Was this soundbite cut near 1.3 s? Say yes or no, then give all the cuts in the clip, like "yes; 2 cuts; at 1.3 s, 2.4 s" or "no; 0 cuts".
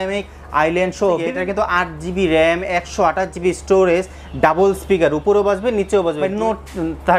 yes; 2 cuts; at 1.3 s, 6.2 s